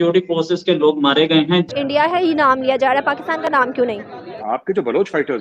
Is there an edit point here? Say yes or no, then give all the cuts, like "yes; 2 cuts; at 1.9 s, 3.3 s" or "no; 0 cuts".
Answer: yes; 2 cuts; at 1.7 s, 4.4 s